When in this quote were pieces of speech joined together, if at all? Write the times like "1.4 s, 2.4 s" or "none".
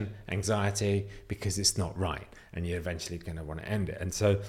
none

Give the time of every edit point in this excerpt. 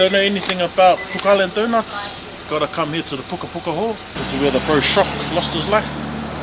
4.1 s

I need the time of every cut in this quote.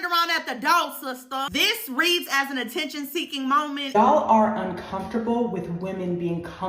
3.8 s

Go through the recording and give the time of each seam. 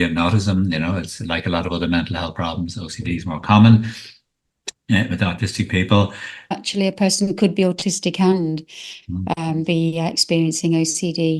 6.5 s

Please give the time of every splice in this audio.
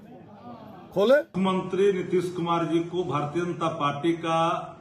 1.3 s

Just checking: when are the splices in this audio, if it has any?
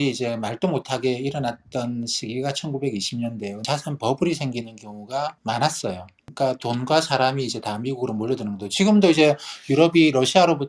3.6 s, 5.4 s, 6.2 s

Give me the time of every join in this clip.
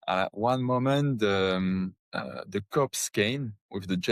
2.0 s

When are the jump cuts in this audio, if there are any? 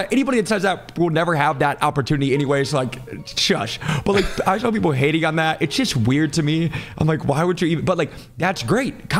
none

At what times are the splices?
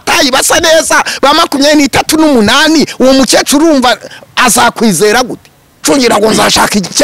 5.8 s

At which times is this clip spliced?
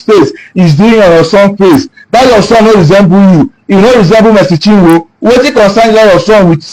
none

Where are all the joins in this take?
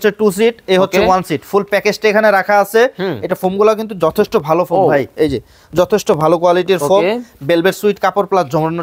none

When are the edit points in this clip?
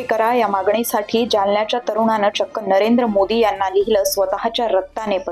none

